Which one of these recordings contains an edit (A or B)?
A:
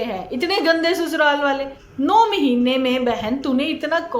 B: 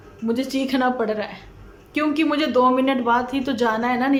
A